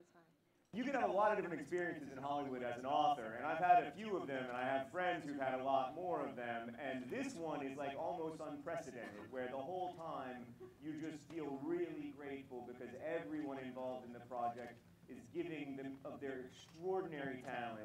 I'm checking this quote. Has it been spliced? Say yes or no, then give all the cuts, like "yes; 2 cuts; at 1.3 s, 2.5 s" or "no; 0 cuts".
no; 0 cuts